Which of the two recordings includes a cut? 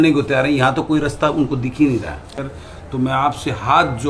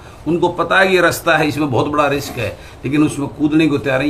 first; 1 cut; at 2.3 s

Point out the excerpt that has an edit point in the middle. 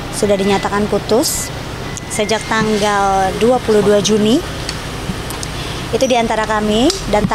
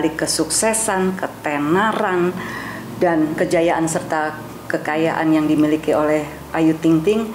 second; 1 cut; at 3.3 s

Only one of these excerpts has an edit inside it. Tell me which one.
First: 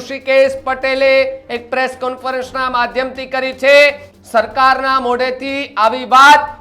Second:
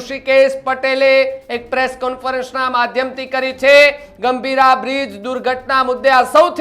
first; 1 cut; at 4.1 s

